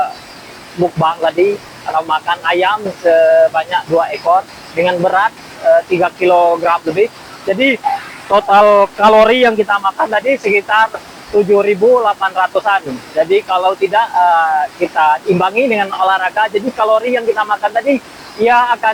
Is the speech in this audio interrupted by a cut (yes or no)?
no